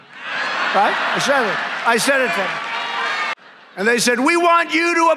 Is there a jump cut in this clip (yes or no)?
yes